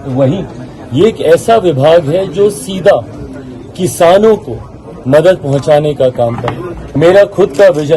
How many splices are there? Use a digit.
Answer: 1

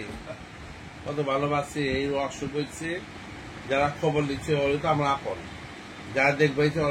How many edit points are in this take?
0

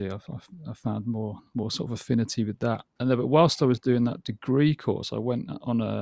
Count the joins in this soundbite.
0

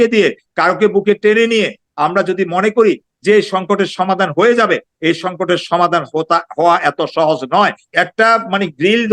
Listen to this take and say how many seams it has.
1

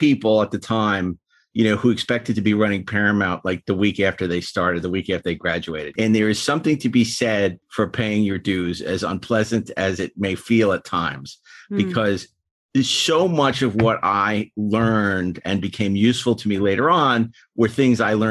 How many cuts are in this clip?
2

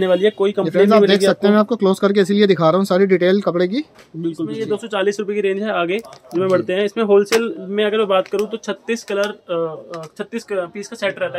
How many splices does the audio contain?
1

